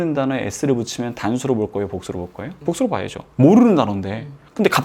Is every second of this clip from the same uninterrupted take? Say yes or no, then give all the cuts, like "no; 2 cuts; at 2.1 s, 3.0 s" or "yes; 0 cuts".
no; 1 cut; at 2.4 s